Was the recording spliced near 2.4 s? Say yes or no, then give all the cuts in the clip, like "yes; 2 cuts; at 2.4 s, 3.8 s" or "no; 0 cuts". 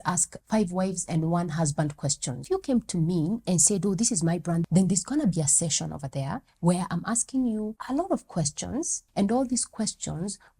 yes; 4 cuts; at 2.4 s, 4.7 s, 7.8 s, 9.0 s